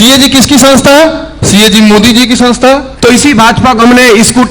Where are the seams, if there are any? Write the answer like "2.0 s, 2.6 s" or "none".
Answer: 2.9 s